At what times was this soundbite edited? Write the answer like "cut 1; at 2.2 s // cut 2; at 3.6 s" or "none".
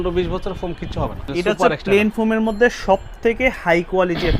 cut 1; at 1.2 s